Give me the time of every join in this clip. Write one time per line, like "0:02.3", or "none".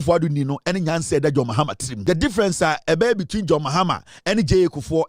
0:01.9